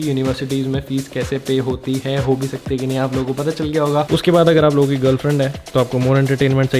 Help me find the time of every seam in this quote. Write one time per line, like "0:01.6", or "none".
0:04.1